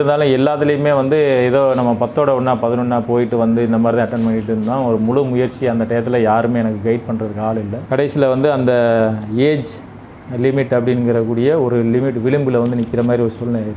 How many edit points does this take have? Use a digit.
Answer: 1